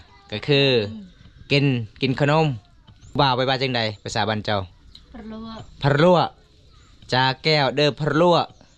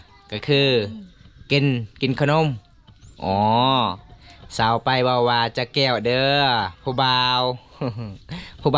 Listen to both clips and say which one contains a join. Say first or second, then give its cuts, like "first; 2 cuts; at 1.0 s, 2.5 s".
first; 1 cut; at 3.2 s